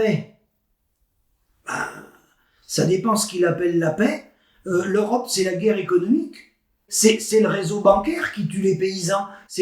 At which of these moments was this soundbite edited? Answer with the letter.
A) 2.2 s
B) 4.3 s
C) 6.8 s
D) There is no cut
C